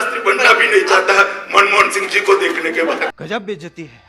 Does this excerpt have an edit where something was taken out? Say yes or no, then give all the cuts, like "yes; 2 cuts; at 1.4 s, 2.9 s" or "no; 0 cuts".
yes; 1 cut; at 3.1 s